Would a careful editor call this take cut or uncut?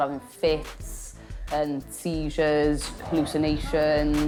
uncut